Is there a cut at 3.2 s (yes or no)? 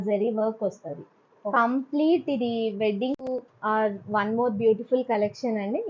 yes